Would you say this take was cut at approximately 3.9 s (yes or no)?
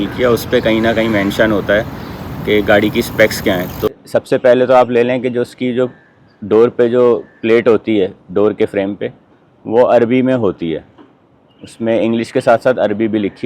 yes